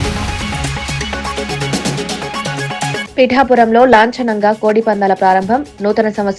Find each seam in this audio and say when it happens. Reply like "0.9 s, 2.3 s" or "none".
3.0 s